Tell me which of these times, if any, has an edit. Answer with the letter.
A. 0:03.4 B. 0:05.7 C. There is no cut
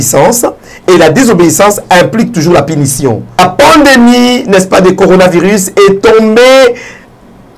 A